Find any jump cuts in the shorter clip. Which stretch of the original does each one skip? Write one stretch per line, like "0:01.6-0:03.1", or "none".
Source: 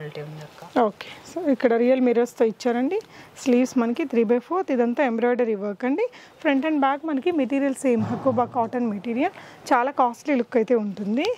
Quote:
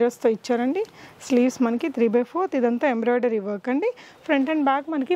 none